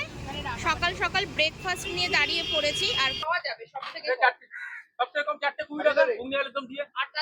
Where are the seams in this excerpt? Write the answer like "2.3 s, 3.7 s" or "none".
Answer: 3.2 s